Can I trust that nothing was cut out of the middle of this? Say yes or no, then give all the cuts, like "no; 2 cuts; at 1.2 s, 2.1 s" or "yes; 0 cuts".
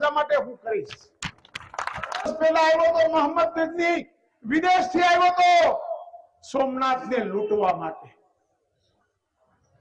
no; 1 cut; at 3.9 s